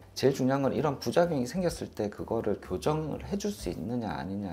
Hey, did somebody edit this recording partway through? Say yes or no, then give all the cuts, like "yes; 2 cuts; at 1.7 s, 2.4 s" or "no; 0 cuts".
no; 0 cuts